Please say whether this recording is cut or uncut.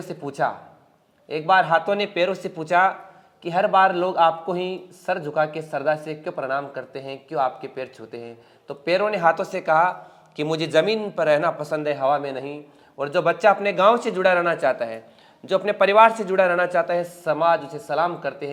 uncut